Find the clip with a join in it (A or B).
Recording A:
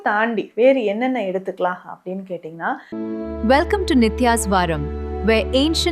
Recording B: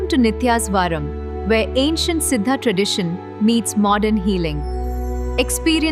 A